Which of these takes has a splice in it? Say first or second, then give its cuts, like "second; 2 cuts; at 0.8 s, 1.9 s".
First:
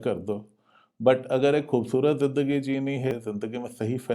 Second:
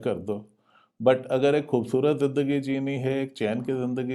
first; 1 cut; at 3.1 s